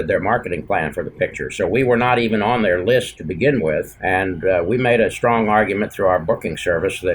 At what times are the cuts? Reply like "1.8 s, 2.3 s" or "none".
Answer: 3.2 s, 3.9 s